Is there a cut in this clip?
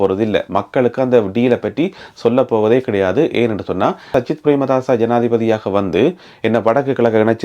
yes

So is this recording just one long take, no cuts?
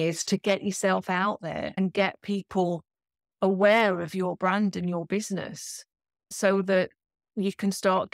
no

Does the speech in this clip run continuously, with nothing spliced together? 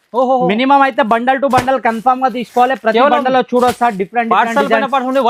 yes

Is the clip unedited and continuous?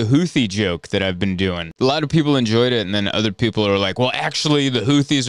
no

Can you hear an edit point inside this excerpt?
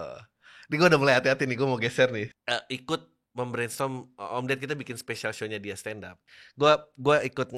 yes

